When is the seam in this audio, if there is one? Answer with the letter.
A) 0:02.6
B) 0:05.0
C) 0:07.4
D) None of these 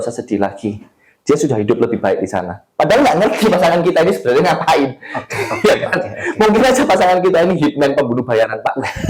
D